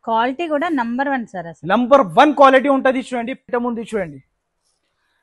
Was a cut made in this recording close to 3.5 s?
yes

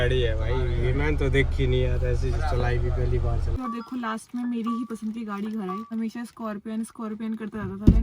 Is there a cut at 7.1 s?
no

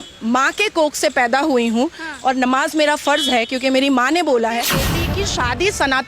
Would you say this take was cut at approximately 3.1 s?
no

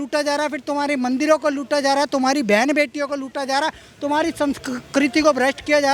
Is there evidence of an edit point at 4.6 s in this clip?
no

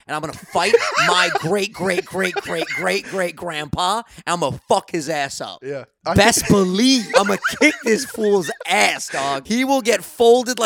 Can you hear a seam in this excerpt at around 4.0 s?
no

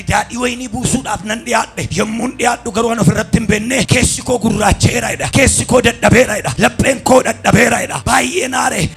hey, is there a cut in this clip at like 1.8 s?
yes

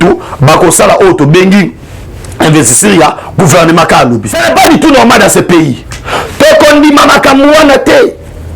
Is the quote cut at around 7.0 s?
no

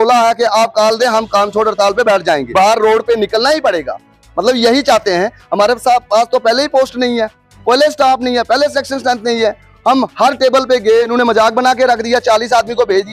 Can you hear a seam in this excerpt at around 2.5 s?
yes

